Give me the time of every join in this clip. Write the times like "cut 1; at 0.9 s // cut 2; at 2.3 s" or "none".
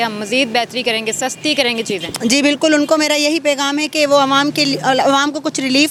none